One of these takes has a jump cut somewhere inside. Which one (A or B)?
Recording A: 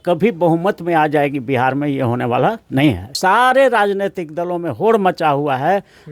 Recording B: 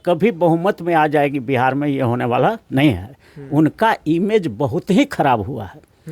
A